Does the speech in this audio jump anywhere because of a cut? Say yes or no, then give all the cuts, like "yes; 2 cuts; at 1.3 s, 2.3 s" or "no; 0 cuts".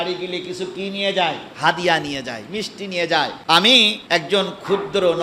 yes; 3 cuts; at 1.5 s, 3.4 s, 4.0 s